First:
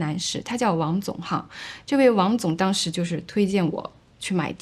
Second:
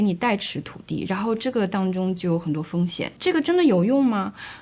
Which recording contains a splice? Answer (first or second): second